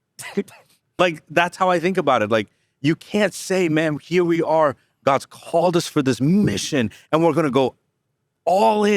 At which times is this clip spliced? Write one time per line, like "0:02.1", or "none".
0:01.0